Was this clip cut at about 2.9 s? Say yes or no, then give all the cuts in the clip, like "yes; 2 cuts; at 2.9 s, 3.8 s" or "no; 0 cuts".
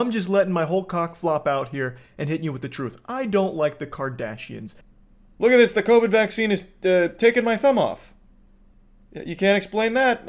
no; 1 cut; at 4.8 s